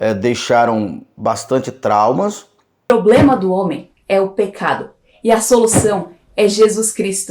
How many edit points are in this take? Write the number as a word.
one